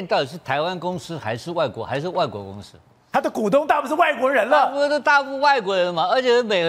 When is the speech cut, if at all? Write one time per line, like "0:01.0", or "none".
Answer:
none